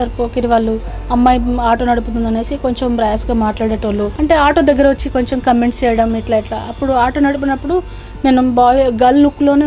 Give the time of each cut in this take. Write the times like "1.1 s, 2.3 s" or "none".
4.1 s

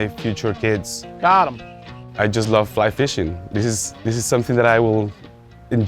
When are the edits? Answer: 1.0 s, 2.1 s

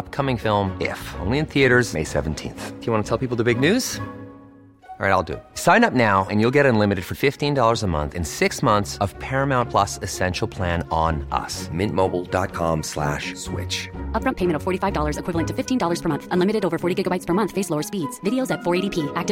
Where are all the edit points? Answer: none

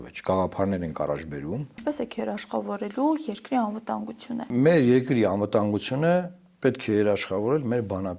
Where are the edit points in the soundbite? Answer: 1.8 s, 4.5 s

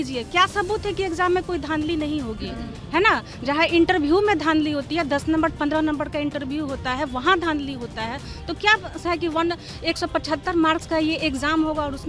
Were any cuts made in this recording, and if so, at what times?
none

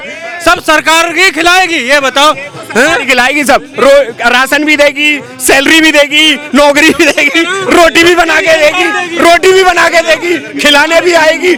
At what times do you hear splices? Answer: none

